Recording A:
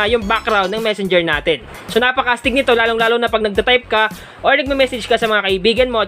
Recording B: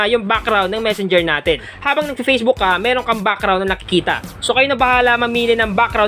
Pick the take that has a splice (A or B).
B